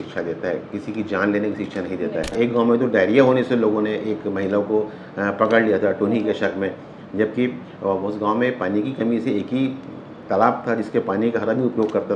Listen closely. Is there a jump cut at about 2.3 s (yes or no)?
yes